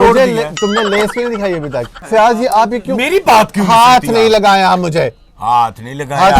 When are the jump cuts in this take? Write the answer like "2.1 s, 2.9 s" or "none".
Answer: 2.0 s